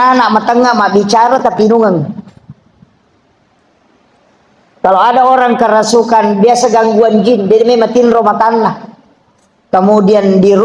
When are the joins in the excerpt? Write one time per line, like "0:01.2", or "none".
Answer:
none